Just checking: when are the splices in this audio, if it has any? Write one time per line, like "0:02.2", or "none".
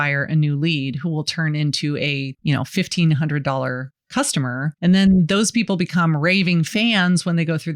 0:02.3
0:04.7